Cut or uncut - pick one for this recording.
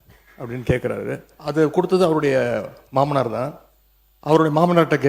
cut